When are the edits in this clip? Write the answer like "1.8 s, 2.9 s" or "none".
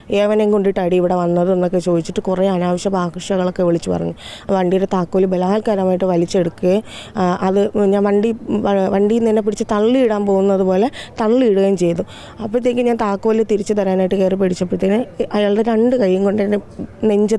4.3 s